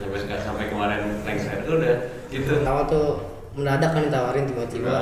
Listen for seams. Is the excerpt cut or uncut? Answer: cut